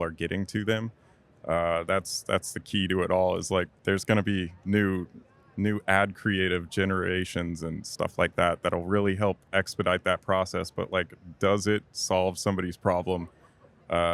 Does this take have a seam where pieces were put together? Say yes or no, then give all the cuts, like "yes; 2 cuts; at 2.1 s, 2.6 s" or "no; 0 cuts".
yes; 1 cut; at 3.7 s